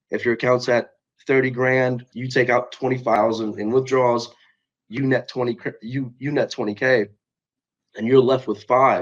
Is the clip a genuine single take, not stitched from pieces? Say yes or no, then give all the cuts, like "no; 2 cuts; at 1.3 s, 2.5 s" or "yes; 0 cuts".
no; 1 cut; at 3.2 s